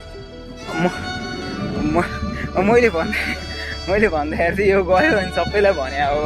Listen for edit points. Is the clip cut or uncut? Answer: uncut